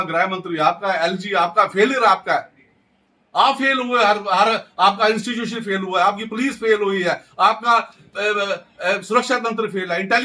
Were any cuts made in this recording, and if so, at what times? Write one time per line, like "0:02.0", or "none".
none